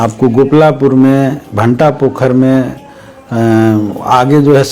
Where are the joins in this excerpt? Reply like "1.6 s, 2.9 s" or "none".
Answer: none